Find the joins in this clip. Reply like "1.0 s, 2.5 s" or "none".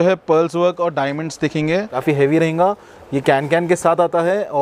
1.9 s